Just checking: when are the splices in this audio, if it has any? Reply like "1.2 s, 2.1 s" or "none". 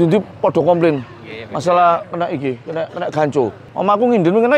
3.6 s